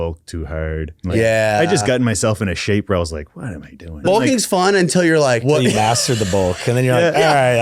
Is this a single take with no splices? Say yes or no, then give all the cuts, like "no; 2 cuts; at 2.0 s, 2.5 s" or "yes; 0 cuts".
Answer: no; 3 cuts; at 0.9 s, 4.0 s, 5.4 s